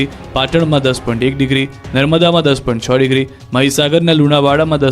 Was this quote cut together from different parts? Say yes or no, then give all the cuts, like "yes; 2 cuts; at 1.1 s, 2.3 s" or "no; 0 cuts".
yes; 1 cut; at 3.6 s